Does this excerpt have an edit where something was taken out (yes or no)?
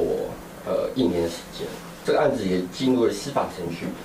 yes